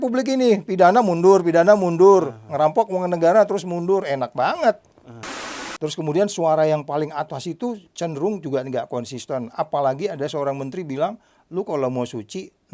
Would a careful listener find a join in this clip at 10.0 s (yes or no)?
no